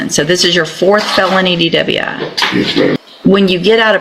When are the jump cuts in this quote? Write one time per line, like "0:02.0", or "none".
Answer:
0:03.0